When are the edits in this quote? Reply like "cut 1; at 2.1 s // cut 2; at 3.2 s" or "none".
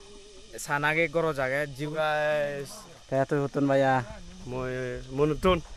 cut 1; at 1.9 s